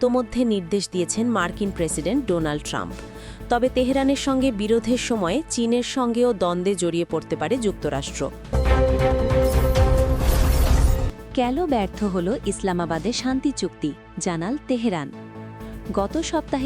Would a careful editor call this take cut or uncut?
cut